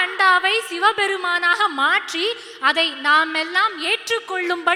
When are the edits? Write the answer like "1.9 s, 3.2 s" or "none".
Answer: none